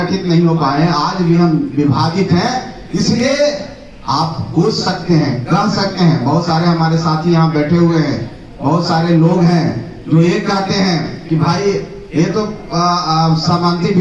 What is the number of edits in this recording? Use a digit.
0